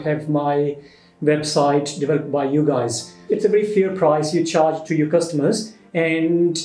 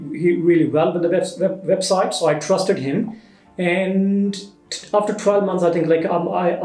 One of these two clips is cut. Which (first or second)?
first